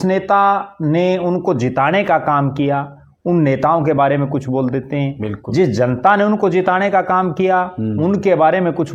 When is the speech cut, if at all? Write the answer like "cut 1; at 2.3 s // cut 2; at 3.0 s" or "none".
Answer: none